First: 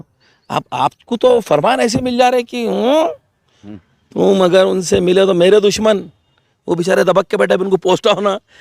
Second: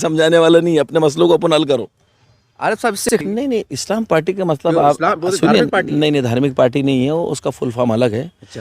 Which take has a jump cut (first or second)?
second